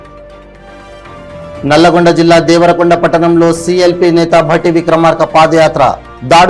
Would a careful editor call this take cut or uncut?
uncut